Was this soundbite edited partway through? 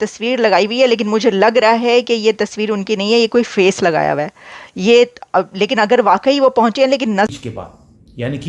yes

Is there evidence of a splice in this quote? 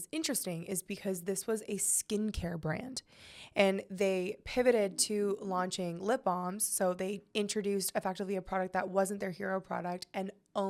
no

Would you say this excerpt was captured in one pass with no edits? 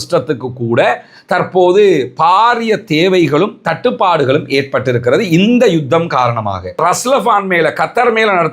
no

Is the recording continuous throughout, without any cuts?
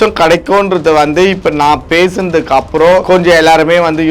no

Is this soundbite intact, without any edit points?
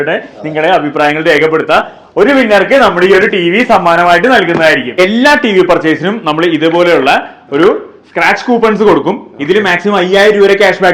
no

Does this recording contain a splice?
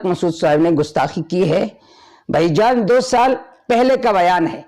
no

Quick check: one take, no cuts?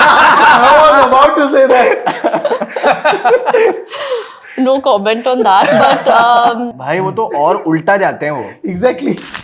no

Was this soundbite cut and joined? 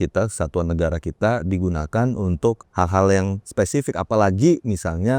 yes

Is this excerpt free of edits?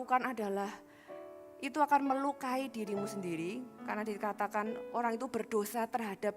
yes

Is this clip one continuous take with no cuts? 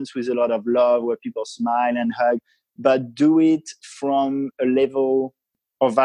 yes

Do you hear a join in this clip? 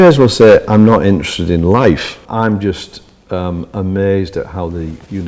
yes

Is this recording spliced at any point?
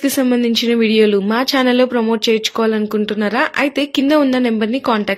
no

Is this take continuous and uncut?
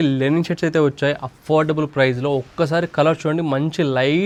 yes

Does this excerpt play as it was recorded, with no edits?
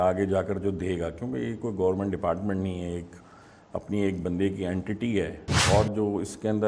no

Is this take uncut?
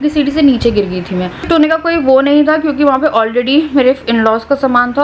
no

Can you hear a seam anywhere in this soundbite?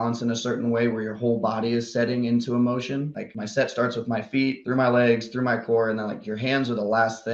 no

